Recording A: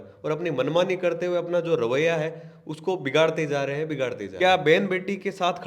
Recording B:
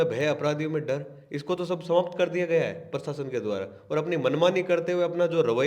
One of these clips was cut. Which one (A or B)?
A